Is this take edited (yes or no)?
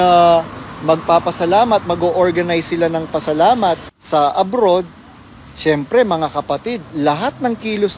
yes